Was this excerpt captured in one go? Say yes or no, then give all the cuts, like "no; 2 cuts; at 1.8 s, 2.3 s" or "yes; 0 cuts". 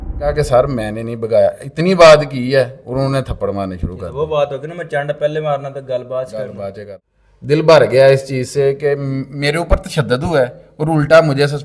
no; 1 cut; at 6.8 s